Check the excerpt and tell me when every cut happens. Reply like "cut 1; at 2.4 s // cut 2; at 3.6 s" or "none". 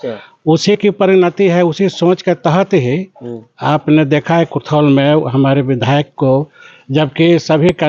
none